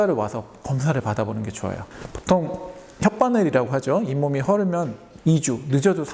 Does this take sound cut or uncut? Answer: cut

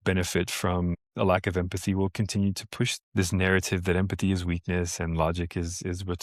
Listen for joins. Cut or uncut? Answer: cut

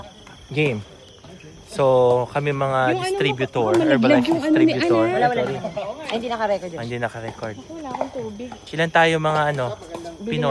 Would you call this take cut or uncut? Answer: uncut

